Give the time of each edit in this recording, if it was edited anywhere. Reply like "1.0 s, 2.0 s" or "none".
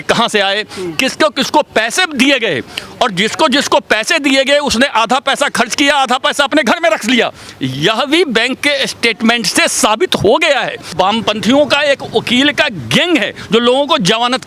10.9 s